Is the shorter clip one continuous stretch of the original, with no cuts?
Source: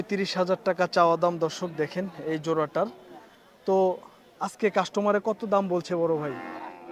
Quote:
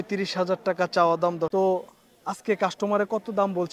no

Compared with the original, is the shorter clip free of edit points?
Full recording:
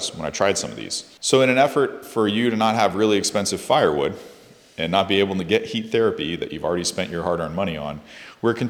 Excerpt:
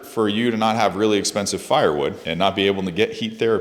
no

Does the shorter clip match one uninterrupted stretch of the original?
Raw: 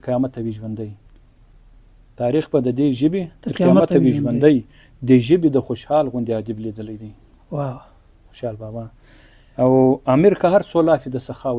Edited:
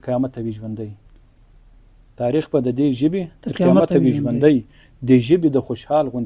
yes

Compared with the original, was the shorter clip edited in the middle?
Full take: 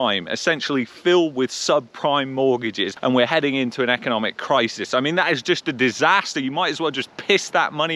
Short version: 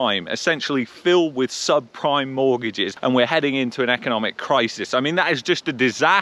no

